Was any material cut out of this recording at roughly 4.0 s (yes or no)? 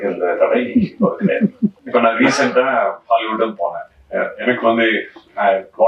no